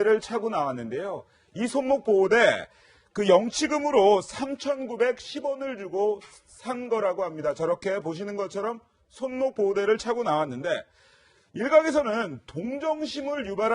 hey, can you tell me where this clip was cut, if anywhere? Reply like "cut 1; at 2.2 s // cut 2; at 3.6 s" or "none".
cut 1; at 11.4 s